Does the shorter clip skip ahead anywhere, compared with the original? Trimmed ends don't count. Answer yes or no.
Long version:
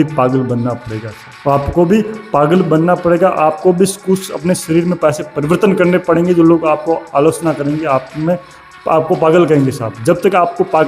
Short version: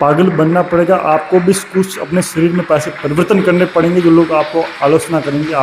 no